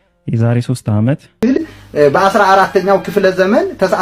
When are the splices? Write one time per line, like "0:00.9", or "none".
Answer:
0:01.4

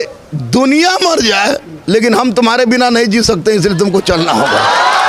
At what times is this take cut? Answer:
none

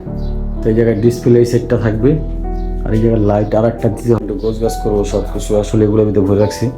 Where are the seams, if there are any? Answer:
0:04.2

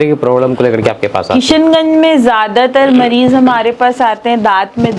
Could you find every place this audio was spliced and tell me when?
none

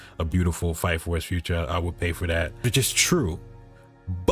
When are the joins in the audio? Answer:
0:02.6

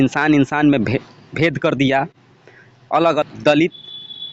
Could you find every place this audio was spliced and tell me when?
0:03.2

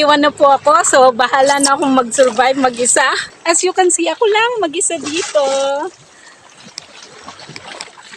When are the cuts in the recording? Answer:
0:03.2

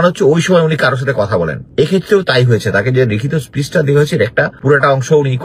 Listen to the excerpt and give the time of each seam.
0:01.6
0:04.5

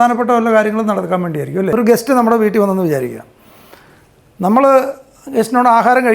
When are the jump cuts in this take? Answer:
0:01.7

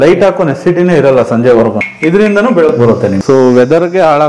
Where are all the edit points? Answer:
0:01.9
0:03.2

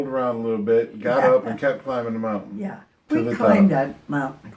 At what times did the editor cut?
none

